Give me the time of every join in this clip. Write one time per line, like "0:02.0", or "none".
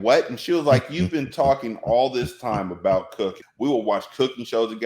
0:03.4